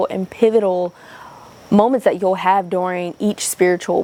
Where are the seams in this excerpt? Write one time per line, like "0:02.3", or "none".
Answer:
none